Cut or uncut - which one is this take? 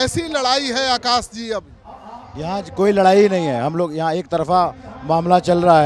uncut